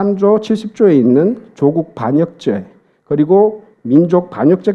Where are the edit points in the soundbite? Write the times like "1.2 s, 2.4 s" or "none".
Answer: none